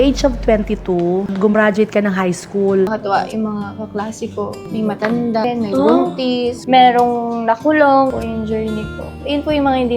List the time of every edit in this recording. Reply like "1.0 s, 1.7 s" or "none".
2.9 s, 8.1 s

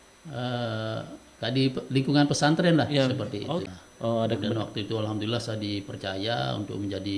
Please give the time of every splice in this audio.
3.7 s

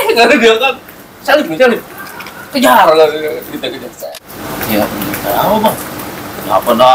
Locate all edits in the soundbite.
3.9 s

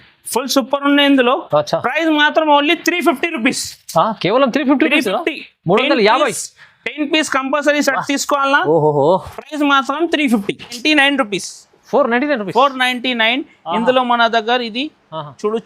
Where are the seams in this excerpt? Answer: 10.8 s

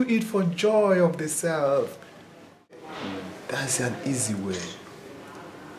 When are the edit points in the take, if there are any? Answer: 2.9 s

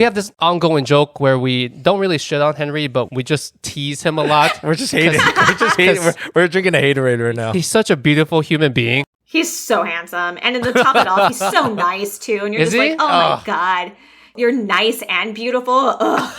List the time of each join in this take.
9.1 s

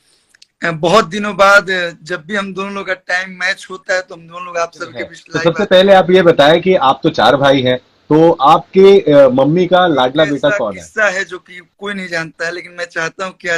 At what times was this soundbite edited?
5.2 s, 10.5 s

